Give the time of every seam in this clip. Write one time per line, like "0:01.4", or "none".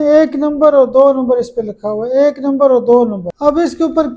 0:03.2

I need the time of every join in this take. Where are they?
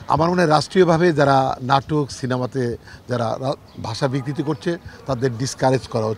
none

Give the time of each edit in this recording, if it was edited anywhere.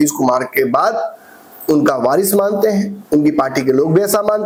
none

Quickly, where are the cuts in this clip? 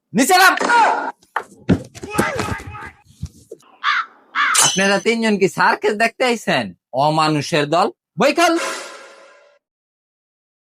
none

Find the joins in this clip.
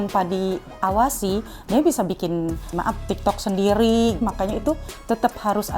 0:02.7
0:04.2

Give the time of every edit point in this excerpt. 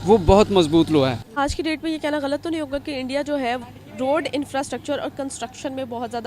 0:01.2
0:03.7

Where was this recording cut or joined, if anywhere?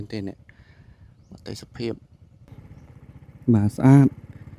0:02.5

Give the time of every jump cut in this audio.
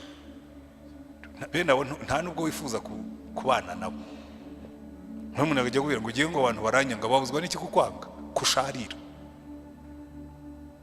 none

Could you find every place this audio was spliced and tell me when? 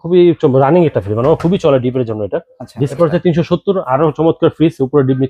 0:02.9

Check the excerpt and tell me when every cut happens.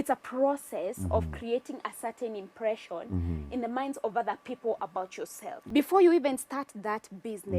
0:05.6

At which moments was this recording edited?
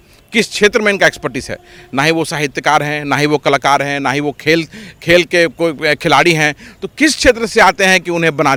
none

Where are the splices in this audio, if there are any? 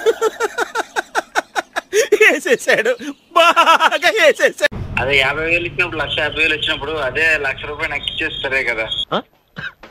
0:04.8

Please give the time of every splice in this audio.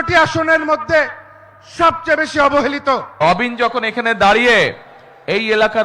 0:03.2

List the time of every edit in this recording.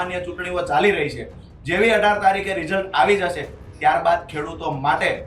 none

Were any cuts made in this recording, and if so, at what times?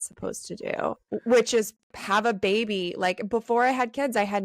0:01.0
0:01.8

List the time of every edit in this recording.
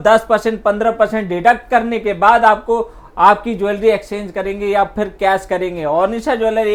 none

